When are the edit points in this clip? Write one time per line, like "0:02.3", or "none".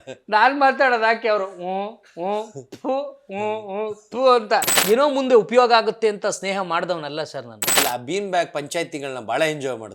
0:04.7
0:07.7